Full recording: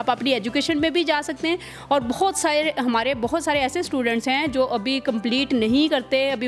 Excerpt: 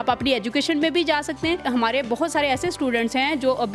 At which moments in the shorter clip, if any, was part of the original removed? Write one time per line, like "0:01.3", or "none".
0:01.6